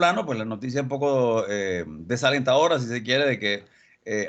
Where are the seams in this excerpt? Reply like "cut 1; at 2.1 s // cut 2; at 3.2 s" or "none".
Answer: none

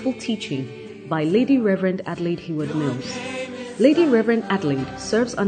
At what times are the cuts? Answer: none

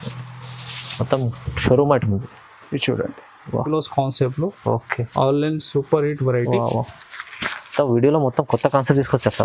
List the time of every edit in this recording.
cut 1; at 3.7 s

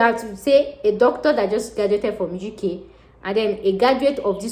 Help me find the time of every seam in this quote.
none

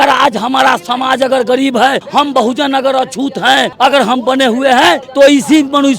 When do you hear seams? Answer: cut 1; at 2.0 s // cut 2; at 3.7 s // cut 3; at 5.1 s

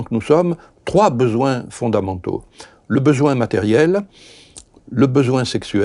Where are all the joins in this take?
none

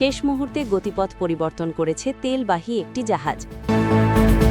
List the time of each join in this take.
cut 1; at 3.5 s

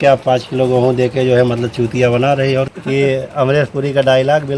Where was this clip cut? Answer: cut 1; at 2.7 s

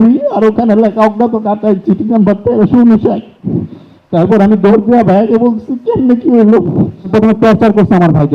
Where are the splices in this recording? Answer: cut 1; at 7.0 s

